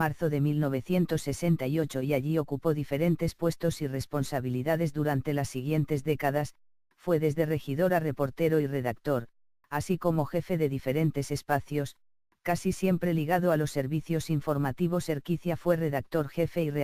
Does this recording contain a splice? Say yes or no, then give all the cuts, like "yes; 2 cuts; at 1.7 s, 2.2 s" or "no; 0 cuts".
yes; 1 cut; at 8.1 s